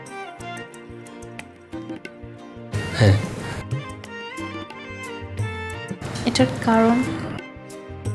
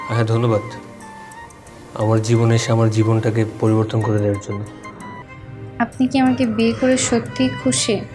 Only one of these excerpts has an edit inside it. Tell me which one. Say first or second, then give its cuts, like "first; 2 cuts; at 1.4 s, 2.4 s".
second; 1 cut; at 5.2 s